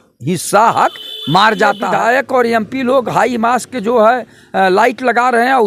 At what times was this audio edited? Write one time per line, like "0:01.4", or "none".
0:01.8